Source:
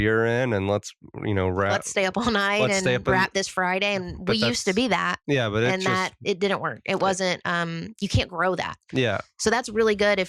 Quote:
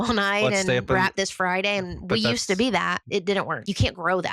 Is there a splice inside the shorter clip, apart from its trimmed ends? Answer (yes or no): yes